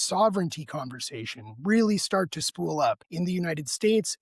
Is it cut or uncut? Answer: cut